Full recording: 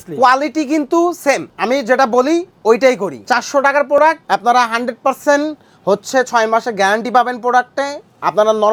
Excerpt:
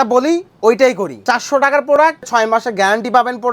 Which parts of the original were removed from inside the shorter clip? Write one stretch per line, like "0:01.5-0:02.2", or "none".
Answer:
0:04.3-0:06.3